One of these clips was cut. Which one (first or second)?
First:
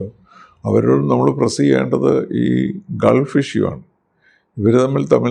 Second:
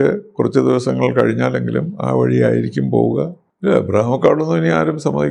second